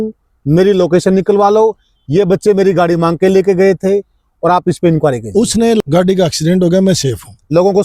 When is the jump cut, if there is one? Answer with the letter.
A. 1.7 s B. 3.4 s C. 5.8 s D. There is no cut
C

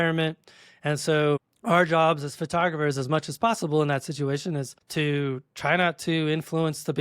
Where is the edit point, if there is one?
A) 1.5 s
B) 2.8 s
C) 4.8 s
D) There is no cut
C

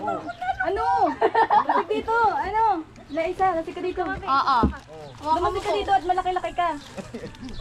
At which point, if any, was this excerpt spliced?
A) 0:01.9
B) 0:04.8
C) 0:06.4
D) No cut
D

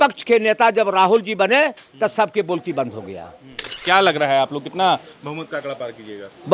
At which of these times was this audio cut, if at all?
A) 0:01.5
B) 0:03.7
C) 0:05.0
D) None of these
B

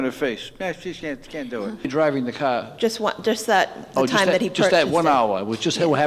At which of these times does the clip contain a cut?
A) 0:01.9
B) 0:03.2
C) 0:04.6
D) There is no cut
A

